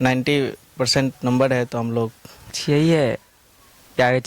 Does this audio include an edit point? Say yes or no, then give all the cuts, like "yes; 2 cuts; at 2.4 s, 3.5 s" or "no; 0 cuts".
yes; 1 cut; at 2.5 s